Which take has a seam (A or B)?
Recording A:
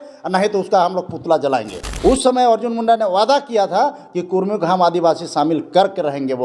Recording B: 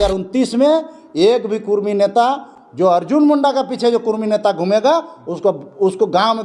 A